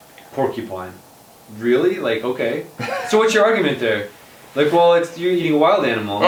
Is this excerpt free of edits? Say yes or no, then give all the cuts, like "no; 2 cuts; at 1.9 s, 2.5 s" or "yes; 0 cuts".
yes; 0 cuts